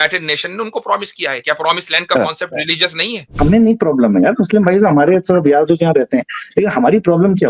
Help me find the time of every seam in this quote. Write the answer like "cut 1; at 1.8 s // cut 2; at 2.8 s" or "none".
cut 1; at 3.4 s